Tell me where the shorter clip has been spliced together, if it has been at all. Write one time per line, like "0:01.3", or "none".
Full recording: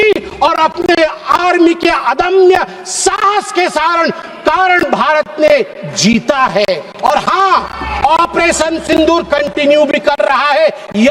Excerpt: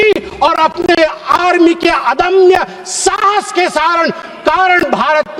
none